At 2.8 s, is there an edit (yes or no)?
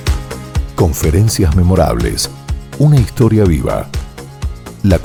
no